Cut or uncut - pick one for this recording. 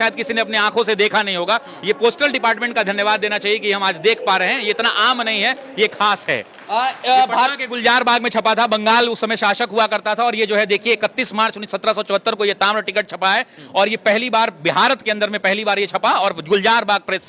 uncut